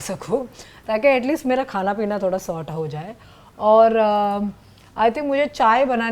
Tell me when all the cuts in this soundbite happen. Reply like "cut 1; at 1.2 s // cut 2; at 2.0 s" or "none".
none